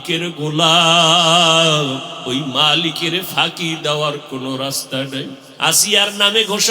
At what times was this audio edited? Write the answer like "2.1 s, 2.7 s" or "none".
2.1 s, 5.4 s